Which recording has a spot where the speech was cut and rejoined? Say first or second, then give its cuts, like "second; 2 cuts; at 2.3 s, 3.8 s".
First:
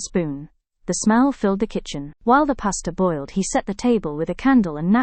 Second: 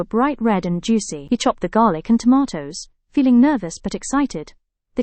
second; 1 cut; at 1.1 s